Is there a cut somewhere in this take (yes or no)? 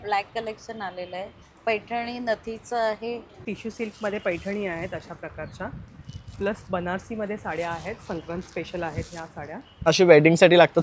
yes